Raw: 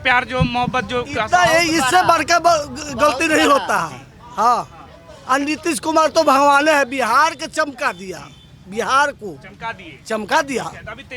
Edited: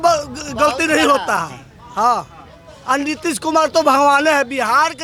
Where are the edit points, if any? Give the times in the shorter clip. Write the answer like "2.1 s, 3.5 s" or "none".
none